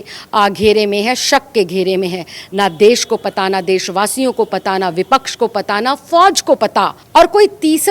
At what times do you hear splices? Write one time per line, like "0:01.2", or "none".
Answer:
0:07.0